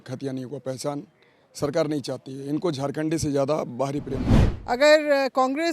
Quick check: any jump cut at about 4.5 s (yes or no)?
yes